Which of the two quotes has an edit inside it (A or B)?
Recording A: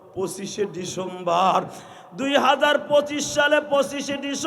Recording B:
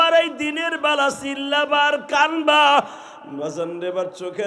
B